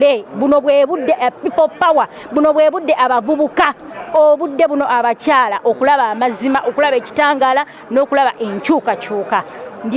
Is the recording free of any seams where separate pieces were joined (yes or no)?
yes